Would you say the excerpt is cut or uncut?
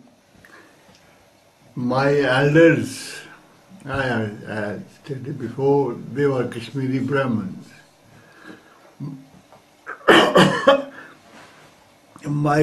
uncut